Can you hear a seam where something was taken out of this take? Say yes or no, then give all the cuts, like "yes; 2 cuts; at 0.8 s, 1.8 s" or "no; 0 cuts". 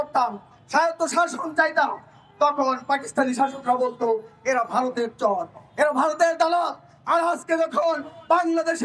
no; 0 cuts